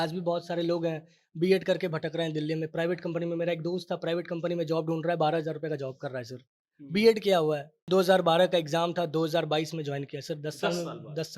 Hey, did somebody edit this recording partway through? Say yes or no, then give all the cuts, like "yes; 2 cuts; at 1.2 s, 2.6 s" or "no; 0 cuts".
yes; 1 cut; at 7.7 s